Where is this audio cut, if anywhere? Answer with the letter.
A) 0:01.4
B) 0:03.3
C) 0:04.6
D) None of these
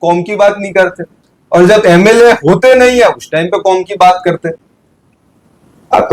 D